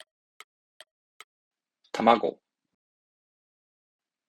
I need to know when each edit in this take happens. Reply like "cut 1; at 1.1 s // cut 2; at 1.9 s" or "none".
none